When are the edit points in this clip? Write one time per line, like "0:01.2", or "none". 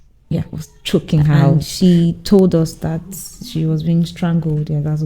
0:01.4